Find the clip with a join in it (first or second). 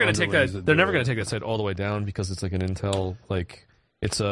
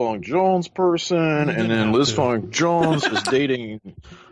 first